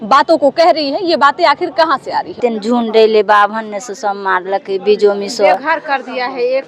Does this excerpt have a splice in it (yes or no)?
yes